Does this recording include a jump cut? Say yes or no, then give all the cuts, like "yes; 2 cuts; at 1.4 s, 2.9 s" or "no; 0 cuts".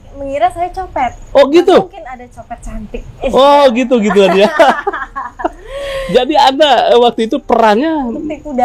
no; 0 cuts